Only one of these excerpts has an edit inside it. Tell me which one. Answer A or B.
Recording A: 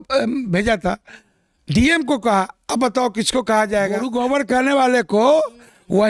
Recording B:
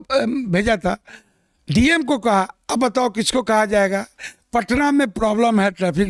A